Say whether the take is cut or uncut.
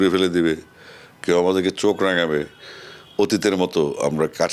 uncut